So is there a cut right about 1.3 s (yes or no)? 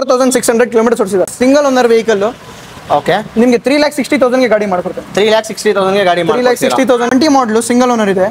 yes